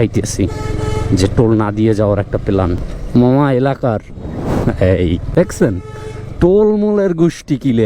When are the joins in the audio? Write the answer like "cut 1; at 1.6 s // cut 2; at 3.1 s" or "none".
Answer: cut 1; at 2.9 s // cut 2; at 5.3 s